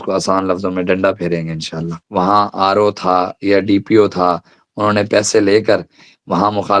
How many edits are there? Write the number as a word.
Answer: one